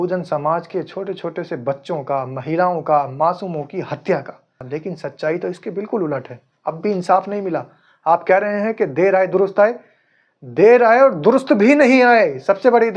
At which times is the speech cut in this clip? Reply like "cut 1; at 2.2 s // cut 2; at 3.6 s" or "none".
cut 1; at 4.6 s

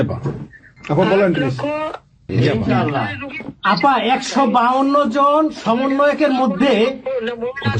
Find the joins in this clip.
cut 1; at 2.3 s

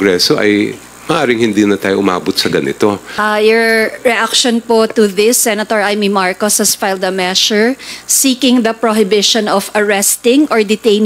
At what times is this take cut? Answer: cut 1; at 3.1 s

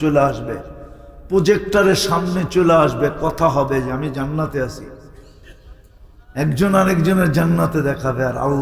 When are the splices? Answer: none

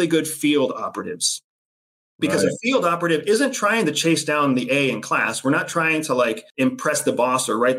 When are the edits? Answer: cut 1; at 6.4 s

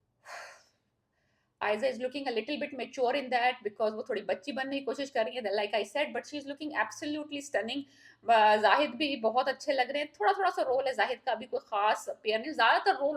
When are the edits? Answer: none

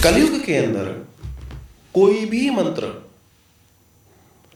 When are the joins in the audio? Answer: none

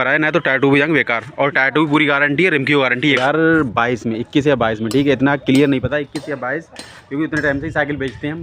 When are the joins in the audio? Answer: cut 1; at 3.2 s

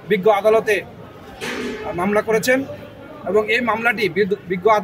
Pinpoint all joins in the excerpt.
none

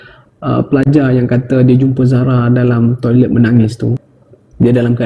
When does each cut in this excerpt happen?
cut 1; at 4.1 s

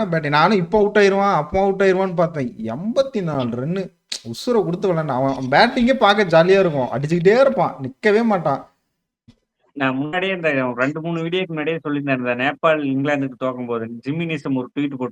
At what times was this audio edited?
cut 1; at 9.3 s

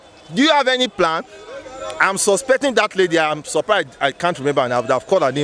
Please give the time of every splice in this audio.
none

